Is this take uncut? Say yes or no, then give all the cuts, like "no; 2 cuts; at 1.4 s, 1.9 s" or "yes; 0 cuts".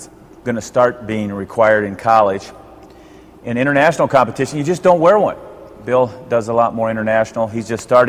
yes; 0 cuts